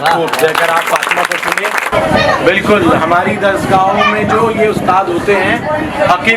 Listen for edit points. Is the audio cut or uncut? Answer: cut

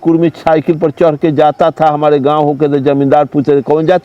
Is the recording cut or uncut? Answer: uncut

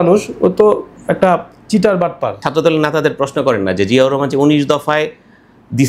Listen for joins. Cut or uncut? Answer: cut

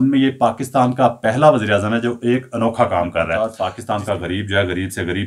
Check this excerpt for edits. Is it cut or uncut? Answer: cut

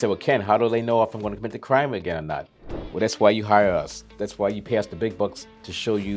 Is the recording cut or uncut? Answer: uncut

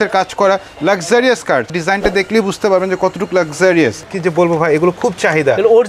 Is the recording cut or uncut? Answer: cut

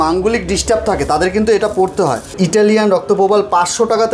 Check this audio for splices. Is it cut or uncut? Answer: cut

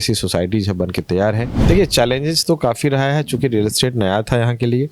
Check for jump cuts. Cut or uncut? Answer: cut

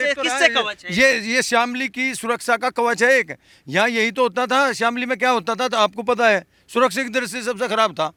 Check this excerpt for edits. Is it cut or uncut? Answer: uncut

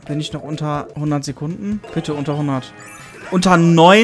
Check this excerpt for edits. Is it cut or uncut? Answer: cut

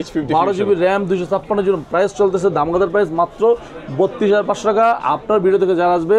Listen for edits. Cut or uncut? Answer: uncut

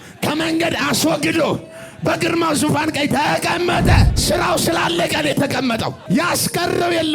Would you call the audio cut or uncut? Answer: cut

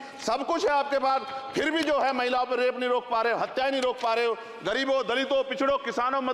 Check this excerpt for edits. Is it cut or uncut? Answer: uncut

